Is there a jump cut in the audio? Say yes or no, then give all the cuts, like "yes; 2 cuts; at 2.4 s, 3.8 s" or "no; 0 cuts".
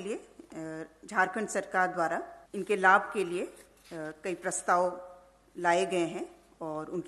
yes; 1 cut; at 2.4 s